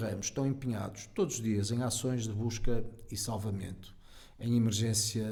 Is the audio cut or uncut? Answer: uncut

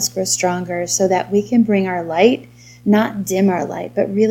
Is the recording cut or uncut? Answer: uncut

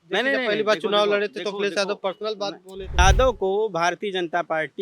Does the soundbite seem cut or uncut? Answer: cut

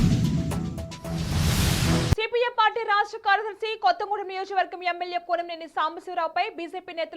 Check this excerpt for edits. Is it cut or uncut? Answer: cut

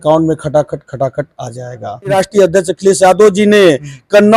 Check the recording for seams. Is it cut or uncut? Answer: cut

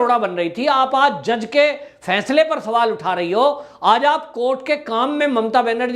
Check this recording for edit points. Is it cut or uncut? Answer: uncut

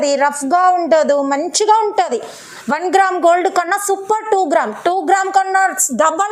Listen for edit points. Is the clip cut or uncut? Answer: uncut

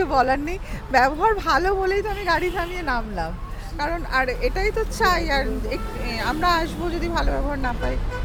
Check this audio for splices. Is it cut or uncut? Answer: uncut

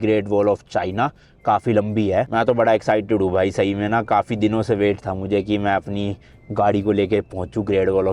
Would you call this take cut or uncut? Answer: uncut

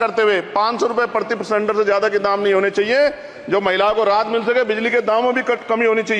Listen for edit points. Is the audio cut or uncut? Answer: uncut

